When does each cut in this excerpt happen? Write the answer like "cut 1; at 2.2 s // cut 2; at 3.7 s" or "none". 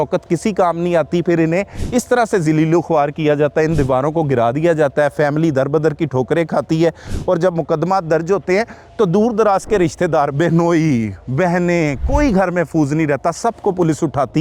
none